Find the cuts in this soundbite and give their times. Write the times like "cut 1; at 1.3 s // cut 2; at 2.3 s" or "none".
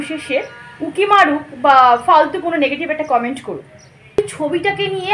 cut 1; at 4.2 s